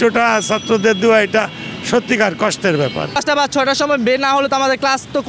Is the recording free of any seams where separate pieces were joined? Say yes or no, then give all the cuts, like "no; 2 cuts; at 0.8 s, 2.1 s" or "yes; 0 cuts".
no; 1 cut; at 3.2 s